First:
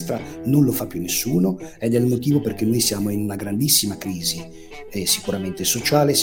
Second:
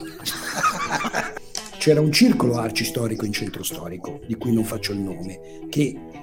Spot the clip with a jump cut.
second; 1 cut; at 1.3 s

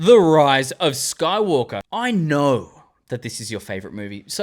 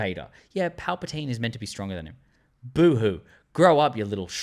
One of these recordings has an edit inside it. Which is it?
first; 1 cut; at 1.8 s

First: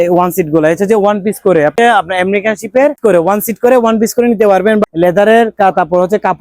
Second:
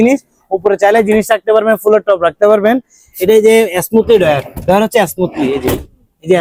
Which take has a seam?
first; 3 cuts; at 1.7 s, 3.0 s, 4.8 s

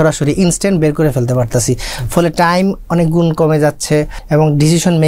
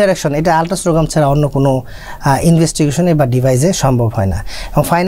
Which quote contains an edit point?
first; 1 cut; at 4.2 s

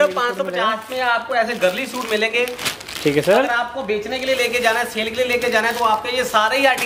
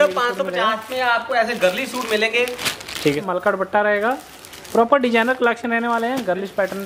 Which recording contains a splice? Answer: second; 1 cut; at 3.2 s

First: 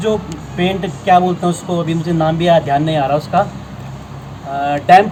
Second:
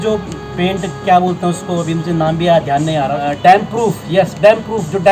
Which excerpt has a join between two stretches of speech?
second; 1 cut; at 3.2 s

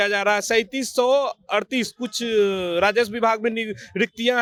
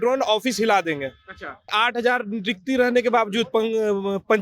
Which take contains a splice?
second; 1 cut; at 1.7 s

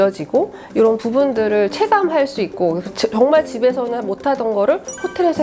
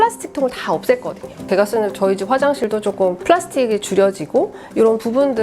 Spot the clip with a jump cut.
second; 2 cuts; at 1.5 s, 2.8 s

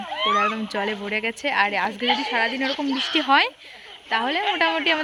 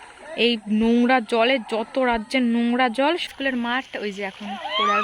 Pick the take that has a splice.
second; 1 cut; at 3.3 s

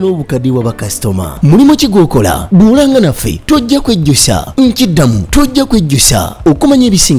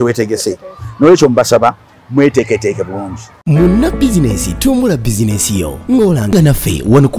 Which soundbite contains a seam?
second; 1 cut; at 3.3 s

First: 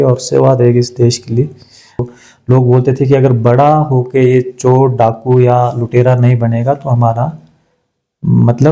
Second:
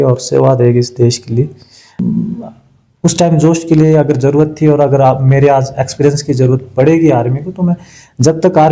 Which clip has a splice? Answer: first; 1 cut; at 2.0 s

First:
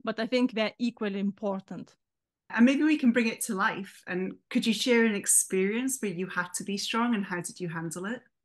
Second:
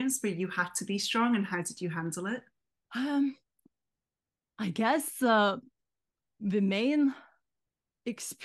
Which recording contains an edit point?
first; 1 cut; at 2.4 s

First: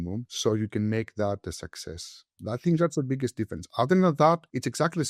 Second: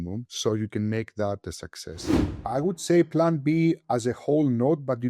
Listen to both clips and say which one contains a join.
second; 1 cut; at 2.3 s

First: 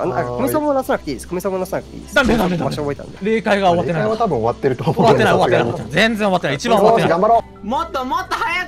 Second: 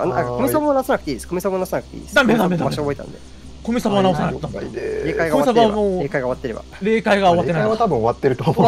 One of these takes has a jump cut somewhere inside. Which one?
first; 2 cuts; at 3.1 s, 7.5 s

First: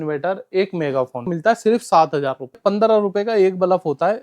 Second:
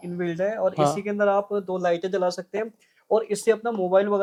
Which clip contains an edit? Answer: first; 2 cuts; at 1.3 s, 2.6 s

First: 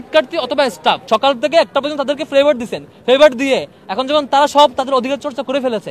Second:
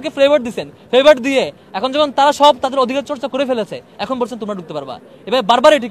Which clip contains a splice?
first; 1 cut; at 1.0 s

